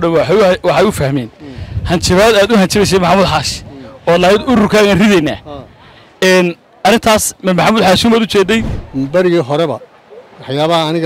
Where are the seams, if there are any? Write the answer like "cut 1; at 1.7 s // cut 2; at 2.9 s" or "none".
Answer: cut 1; at 8.8 s

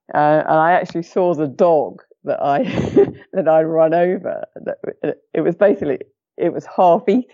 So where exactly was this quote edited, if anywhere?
none

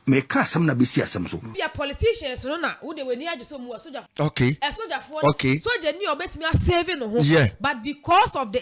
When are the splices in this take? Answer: cut 1; at 1.5 s // cut 2; at 4.1 s

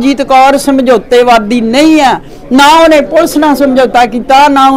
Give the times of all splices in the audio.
none

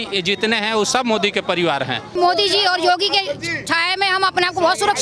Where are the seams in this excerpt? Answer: cut 1; at 2.1 s

